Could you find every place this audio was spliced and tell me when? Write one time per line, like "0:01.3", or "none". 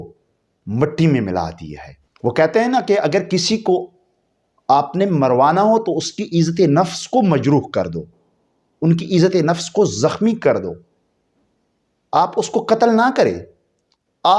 none